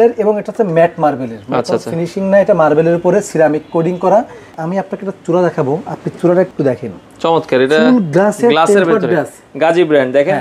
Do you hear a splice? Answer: yes; 2 cuts; at 4.5 s, 6.5 s

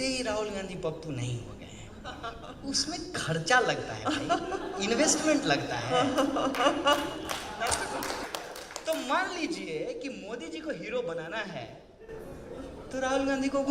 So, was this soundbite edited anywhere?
yes; 1 cut; at 8.2 s

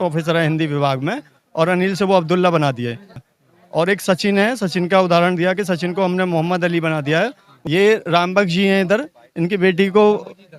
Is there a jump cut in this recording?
yes; 2 cuts; at 3.2 s, 7.5 s

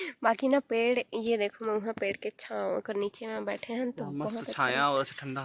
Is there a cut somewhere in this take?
no; 0 cuts

